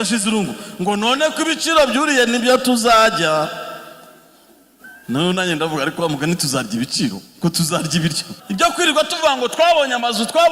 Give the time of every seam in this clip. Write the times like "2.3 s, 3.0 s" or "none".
8.3 s